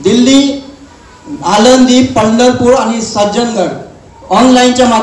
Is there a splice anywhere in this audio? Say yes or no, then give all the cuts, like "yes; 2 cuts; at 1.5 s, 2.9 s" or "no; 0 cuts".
no; 0 cuts